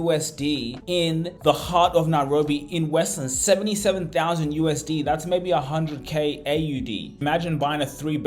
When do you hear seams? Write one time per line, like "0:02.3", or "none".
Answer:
0:01.1
0:07.1